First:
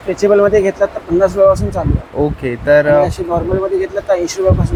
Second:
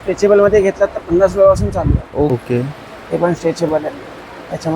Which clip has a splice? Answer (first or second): second